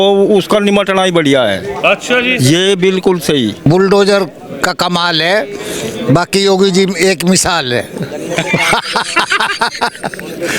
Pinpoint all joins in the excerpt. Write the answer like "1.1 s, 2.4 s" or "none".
3.7 s